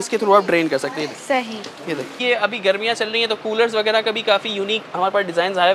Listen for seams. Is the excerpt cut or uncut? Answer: cut